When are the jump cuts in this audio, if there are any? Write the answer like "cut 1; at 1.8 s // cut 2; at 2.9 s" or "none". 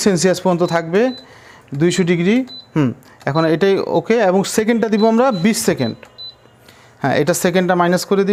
none